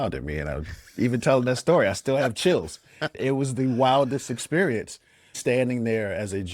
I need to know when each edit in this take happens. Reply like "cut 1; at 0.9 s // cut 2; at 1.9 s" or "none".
cut 1; at 3.1 s // cut 2; at 5.4 s